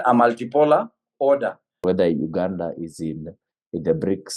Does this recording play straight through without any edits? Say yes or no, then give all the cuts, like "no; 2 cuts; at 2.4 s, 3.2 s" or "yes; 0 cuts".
no; 1 cut; at 1.8 s